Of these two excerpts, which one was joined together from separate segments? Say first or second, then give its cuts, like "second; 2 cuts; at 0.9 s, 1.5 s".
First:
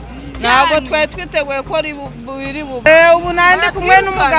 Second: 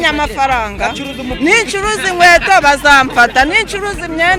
first; 1 cut; at 2.9 s